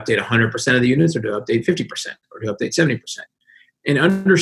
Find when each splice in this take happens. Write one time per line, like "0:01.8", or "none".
none